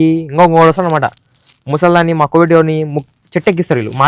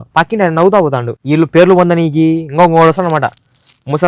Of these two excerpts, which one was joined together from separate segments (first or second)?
second